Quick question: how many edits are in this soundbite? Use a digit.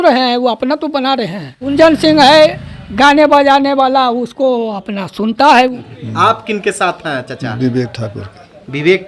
2